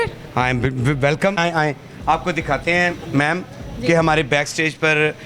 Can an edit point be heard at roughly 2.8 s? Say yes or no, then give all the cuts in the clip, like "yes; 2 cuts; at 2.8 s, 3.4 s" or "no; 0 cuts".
no; 1 cut; at 1.4 s